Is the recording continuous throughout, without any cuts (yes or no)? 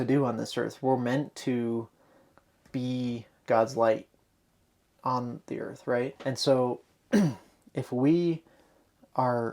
no